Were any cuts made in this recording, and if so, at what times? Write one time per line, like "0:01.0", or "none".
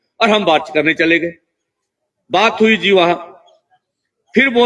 none